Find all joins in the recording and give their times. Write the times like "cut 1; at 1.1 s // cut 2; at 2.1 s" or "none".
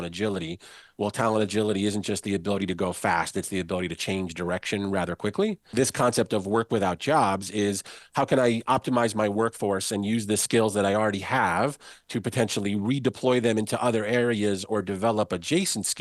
cut 1; at 5.7 s